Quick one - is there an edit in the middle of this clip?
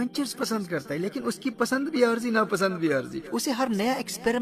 no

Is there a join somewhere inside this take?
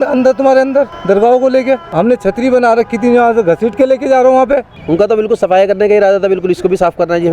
yes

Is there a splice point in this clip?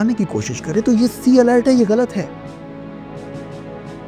no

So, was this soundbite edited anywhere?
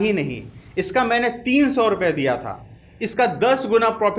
yes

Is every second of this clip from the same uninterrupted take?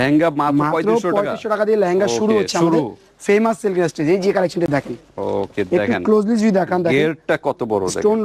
yes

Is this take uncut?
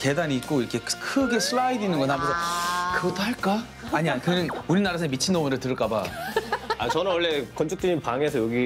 yes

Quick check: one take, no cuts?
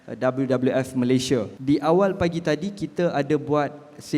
no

